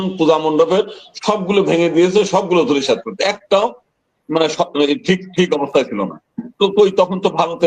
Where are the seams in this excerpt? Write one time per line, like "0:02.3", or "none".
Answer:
none